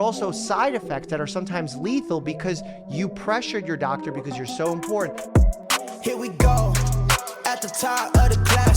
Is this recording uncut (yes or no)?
no